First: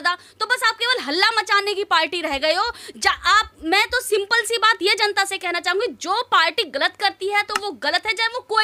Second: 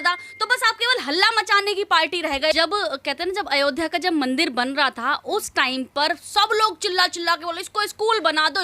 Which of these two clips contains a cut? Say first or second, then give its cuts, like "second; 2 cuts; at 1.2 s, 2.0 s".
second; 1 cut; at 2.5 s